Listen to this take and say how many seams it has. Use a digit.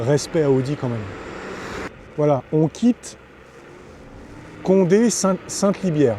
1